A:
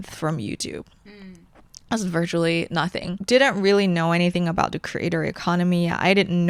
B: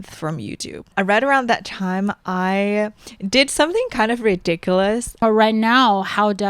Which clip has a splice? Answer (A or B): B